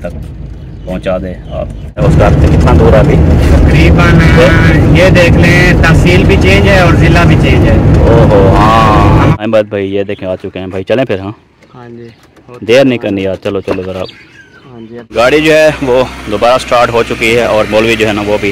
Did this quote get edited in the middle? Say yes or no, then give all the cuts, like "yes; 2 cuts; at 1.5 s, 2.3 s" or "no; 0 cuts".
yes; 3 cuts; at 2.0 s, 9.4 s, 15.0 s